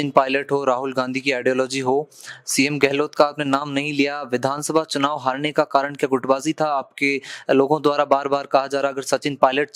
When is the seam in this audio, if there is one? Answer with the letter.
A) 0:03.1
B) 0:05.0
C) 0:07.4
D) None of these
D